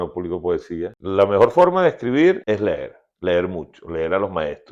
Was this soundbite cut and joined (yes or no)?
yes